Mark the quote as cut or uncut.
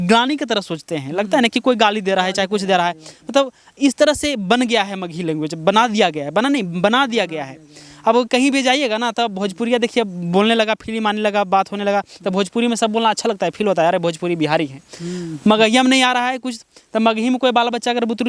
uncut